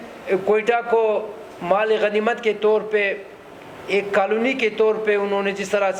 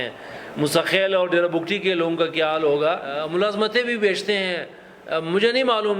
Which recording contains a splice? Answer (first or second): second